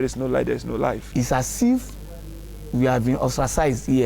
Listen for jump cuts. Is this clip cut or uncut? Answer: cut